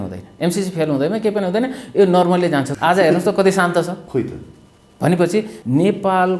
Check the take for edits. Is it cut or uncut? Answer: cut